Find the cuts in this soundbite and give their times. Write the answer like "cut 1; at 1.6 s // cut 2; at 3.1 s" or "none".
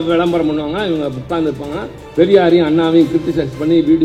none